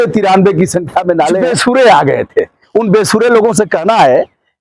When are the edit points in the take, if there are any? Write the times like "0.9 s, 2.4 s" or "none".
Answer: 1.4 s